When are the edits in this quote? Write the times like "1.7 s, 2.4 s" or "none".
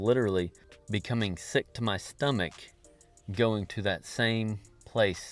none